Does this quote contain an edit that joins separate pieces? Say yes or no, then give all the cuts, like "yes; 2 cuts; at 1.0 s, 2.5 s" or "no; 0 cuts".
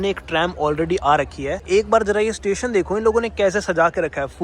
yes; 1 cut; at 1.6 s